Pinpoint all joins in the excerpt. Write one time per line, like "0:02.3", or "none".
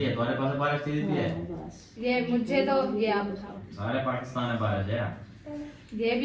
none